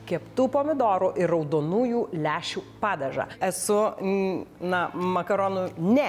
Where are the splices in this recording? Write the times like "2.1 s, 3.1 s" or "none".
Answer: 3.3 s